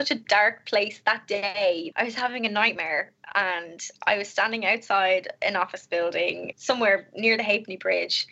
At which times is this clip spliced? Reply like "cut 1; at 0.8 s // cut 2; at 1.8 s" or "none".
cut 1; at 1.9 s // cut 2; at 6.5 s